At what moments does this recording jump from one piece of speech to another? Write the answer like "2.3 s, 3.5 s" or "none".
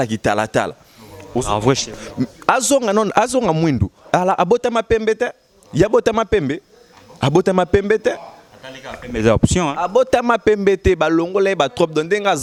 none